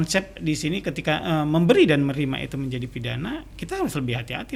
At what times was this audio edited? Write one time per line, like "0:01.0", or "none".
none